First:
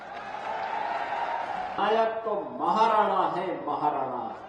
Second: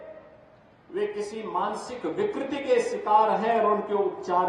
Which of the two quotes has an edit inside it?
first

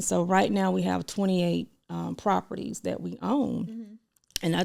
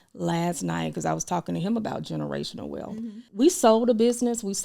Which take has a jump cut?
second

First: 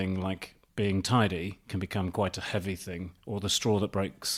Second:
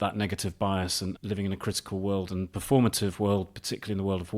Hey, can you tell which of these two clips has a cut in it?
second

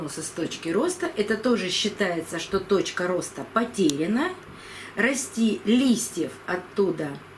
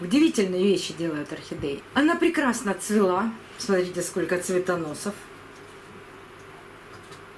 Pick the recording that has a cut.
second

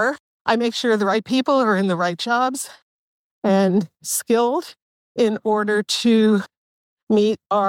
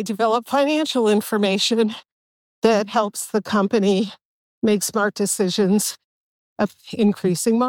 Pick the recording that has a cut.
second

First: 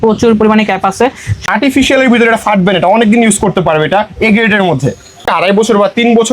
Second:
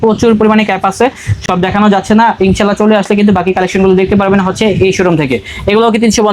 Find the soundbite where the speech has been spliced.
first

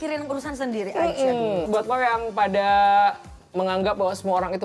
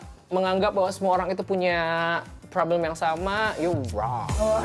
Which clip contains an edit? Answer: first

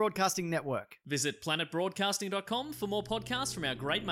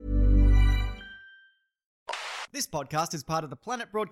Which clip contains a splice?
second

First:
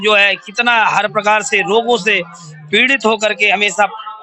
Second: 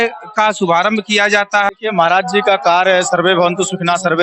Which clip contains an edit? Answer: second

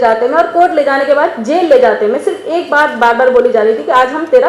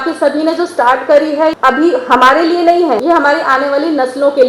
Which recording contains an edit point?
second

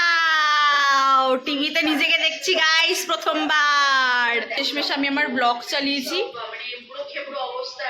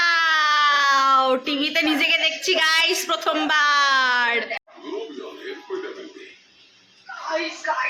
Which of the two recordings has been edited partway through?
first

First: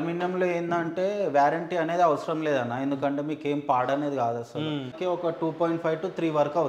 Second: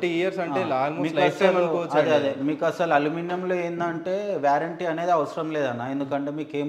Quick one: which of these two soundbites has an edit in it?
first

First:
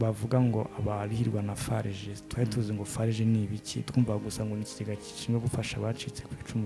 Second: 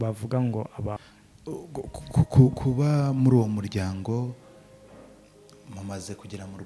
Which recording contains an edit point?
second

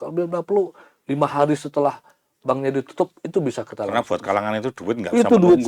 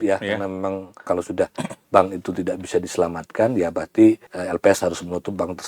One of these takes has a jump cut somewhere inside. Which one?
second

